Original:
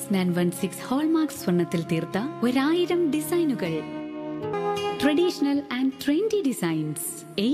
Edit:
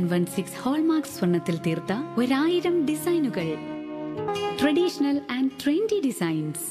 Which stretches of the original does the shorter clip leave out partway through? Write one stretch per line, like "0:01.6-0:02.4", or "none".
0:04.5-0:04.7